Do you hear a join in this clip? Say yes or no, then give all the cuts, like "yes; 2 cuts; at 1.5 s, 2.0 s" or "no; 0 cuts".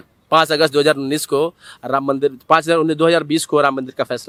no; 0 cuts